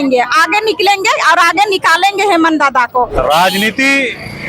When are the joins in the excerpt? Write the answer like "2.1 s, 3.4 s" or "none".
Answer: 3.1 s